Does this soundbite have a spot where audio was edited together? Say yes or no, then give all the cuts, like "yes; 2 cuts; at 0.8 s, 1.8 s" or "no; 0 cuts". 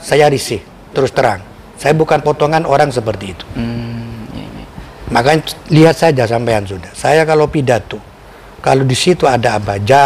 no; 0 cuts